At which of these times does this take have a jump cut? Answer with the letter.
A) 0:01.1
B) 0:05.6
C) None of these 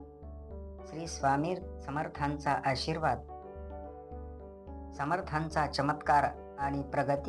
A